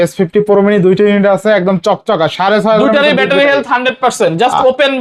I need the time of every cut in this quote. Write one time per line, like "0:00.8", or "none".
none